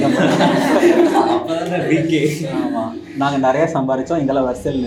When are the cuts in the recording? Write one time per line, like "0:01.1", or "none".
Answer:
none